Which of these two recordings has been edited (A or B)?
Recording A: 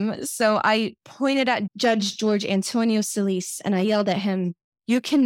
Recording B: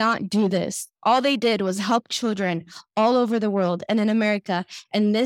A